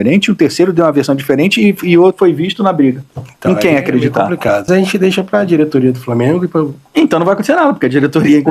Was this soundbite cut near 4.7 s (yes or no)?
yes